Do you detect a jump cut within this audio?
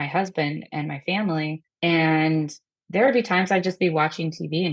yes; 1 cut; at 1.6 s

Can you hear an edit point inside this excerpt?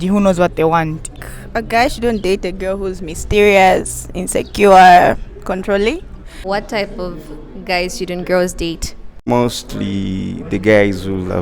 yes; 2 cuts; at 1.1 s, 6.5 s

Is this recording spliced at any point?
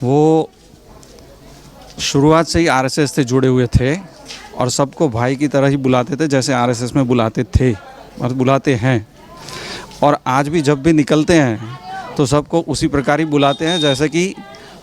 no; 0 cuts

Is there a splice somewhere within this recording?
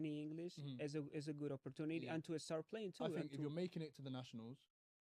yes; 1 cut; at 3.3 s

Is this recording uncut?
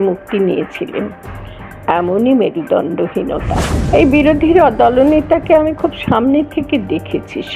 no; 1 cut; at 3.7 s

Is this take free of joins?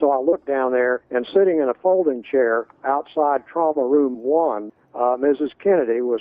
no; 3 cuts; at 1.0 s, 2.7 s, 4.7 s

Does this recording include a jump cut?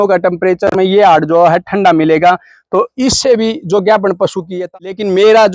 yes; 1 cut; at 4.6 s

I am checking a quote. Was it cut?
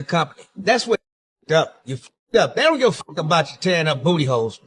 no; 0 cuts

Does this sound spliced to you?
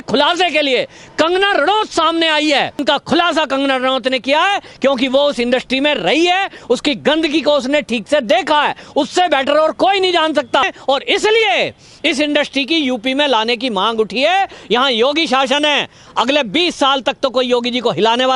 yes; 2 cuts; at 2.8 s, 10.6 s

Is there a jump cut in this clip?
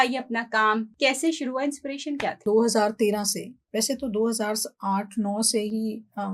yes; 2 cuts; at 0.9 s, 2.4 s

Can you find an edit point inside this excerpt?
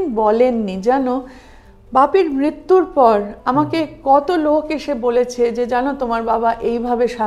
no; 0 cuts

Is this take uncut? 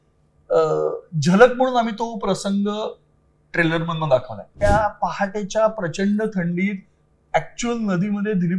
no; 1 cut; at 4.5 s

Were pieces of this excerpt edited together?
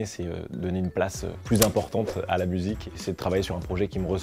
yes; 1 cut; at 2.9 s

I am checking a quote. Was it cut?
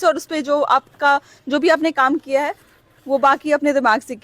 no; 0 cuts

